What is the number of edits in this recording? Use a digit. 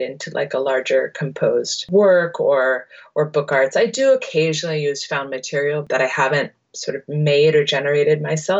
2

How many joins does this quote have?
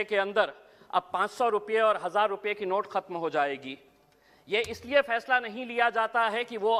0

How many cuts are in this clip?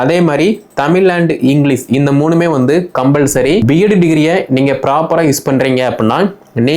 1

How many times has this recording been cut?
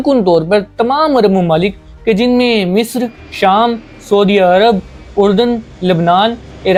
0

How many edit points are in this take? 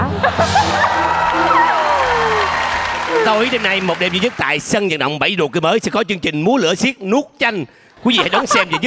0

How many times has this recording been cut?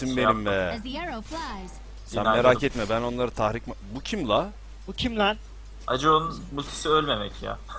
1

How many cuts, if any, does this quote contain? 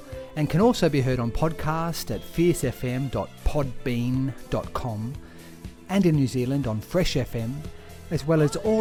0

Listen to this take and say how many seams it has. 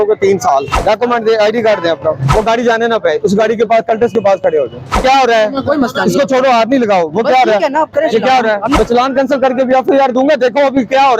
4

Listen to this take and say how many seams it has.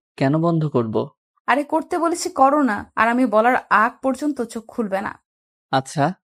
0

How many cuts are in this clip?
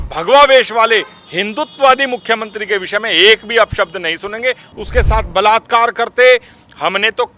1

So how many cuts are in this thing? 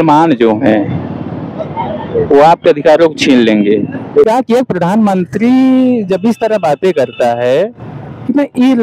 1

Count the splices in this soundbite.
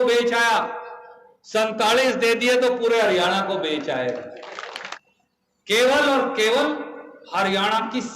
1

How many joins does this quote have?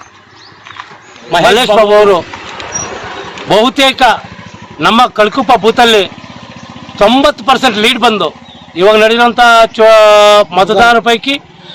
1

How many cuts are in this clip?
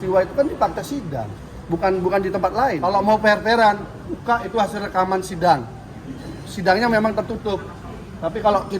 1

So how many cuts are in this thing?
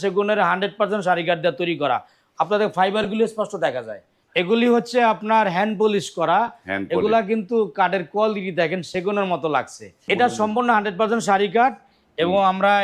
2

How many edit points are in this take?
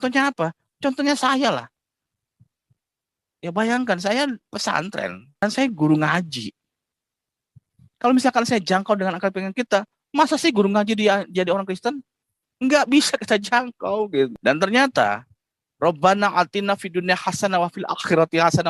2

